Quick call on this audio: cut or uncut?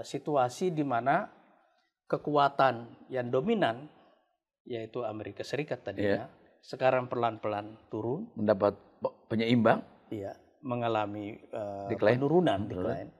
uncut